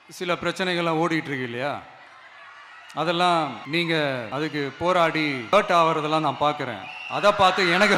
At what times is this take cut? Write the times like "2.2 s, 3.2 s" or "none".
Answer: 3.6 s, 4.3 s, 5.5 s